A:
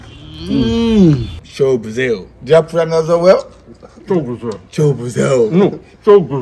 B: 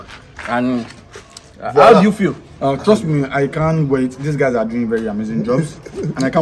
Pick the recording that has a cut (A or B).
A